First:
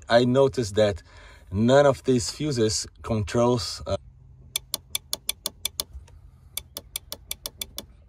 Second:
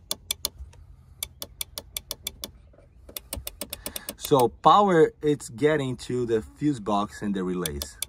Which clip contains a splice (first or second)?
first